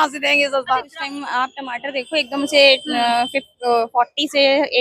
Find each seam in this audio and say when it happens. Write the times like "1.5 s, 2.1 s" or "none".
0.9 s